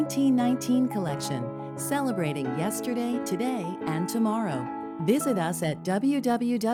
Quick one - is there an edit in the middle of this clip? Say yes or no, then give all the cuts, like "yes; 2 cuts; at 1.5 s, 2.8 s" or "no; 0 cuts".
no; 0 cuts